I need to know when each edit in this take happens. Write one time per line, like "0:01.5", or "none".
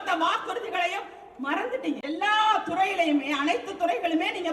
0:02.0